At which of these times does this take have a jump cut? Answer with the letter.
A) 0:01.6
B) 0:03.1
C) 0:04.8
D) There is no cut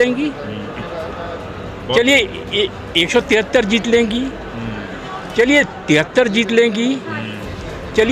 D